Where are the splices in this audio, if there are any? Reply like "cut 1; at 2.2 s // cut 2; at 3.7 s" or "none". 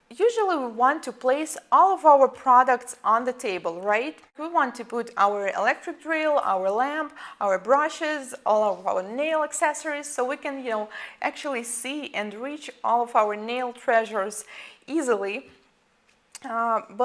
cut 1; at 4.3 s